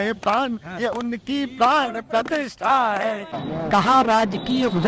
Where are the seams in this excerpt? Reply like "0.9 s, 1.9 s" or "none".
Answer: 3.3 s